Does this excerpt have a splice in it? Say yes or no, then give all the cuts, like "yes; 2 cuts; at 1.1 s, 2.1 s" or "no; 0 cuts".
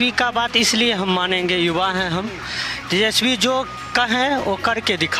no; 0 cuts